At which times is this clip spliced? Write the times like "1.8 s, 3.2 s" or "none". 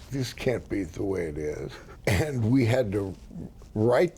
1.8 s